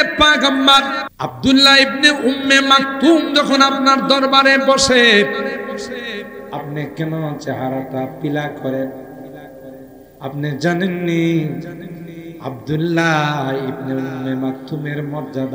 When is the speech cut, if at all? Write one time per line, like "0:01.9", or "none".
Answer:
0:01.0